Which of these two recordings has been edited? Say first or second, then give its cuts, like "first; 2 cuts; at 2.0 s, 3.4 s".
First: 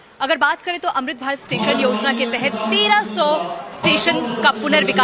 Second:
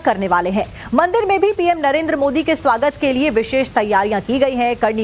first; 1 cut; at 2.8 s